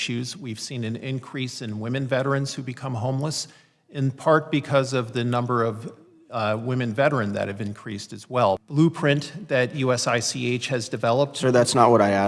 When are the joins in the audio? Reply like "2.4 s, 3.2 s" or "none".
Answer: 8.6 s